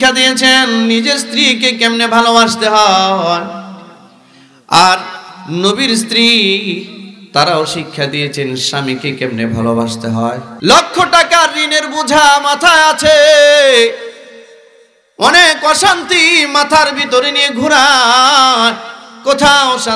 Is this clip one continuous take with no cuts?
no; 1 cut; at 10.5 s

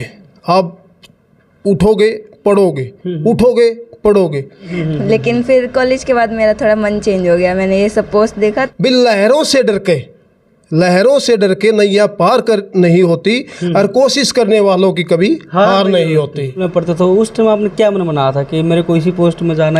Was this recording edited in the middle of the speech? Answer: yes; 3 cuts; at 4.8 s, 8.6 s, 16.7 s

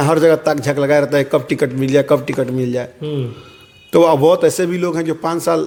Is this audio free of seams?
yes; 0 cuts

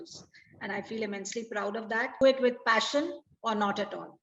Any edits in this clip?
yes; 1 cut; at 2.2 s

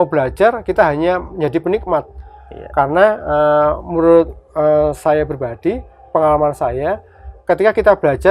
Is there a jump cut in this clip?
no; 0 cuts

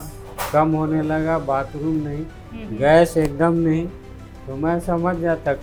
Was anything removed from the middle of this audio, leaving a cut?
no; 0 cuts

